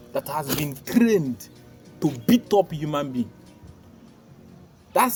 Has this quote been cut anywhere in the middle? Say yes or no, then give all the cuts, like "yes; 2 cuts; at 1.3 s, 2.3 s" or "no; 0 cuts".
no; 0 cuts